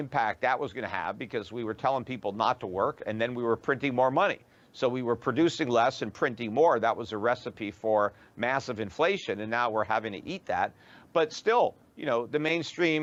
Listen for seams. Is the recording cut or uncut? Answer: uncut